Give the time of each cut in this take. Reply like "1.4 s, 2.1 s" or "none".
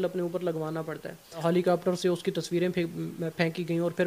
1.4 s